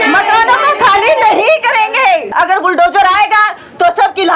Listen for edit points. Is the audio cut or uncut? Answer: cut